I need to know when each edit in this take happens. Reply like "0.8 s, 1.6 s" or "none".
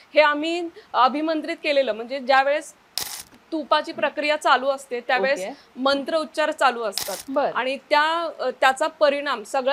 none